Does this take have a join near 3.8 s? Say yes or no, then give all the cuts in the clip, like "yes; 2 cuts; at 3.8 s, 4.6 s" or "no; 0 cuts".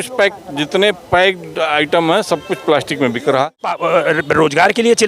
yes; 1 cut; at 3.8 s